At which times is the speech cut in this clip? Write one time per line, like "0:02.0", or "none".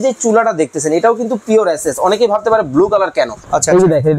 none